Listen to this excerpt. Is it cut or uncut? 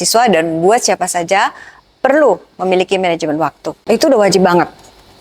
cut